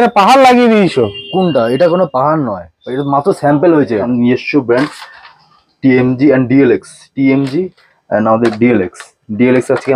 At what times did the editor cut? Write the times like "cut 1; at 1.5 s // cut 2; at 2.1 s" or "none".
cut 1; at 4.1 s

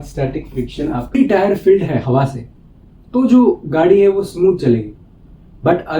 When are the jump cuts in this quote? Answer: cut 1; at 1.1 s

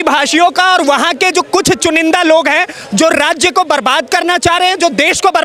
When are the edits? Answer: none

